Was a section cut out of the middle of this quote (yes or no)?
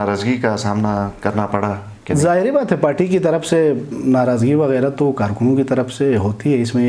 no